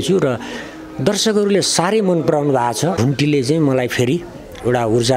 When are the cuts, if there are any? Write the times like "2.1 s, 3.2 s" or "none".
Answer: 3.0 s